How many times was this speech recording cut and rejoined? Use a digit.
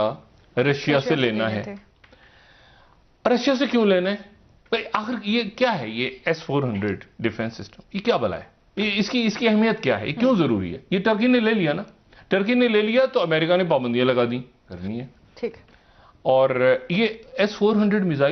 0